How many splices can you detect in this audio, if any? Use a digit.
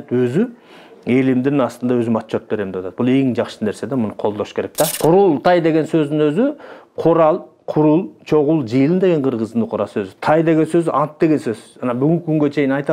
1